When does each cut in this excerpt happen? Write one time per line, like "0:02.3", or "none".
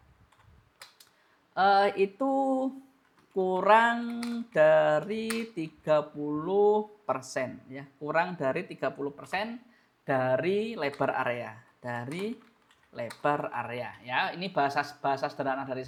none